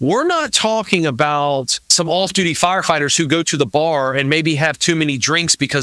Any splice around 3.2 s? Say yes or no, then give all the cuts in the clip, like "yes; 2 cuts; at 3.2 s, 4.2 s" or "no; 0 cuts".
no; 1 cut; at 1.9 s